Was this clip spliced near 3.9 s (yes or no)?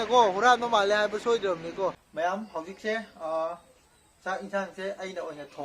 no